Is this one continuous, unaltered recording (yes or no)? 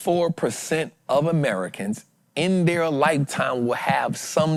yes